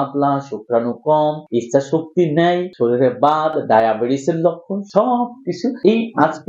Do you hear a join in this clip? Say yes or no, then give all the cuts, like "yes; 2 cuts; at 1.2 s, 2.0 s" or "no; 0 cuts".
no; 0 cuts